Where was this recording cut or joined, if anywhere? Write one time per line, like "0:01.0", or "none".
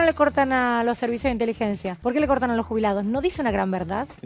0:01.9